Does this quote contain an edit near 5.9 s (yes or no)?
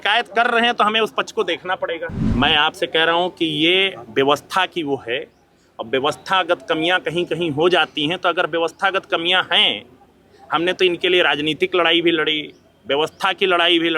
no